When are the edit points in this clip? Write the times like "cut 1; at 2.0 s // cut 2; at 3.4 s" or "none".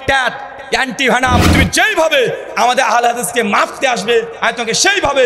cut 1; at 1.5 s